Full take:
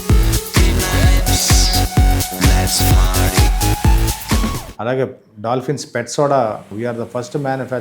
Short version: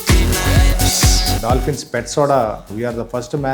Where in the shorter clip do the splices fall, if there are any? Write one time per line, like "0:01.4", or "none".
0:01.4